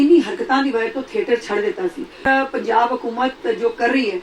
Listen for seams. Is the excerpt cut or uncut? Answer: cut